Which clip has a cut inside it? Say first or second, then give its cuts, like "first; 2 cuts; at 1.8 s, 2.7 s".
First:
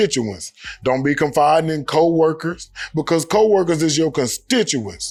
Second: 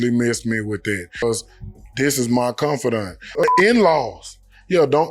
second; 2 cuts; at 1.2 s, 3.3 s